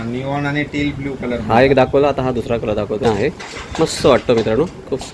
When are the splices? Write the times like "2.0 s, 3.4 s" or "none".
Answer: 3.0 s